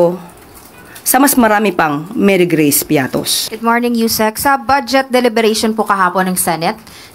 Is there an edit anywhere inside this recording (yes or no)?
yes